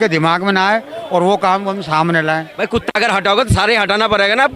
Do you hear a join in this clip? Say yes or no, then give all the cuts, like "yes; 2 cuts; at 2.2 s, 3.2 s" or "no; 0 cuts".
yes; 1 cut; at 2.5 s